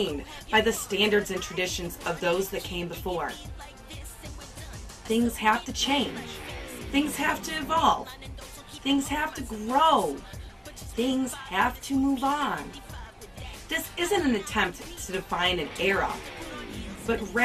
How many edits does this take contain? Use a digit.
1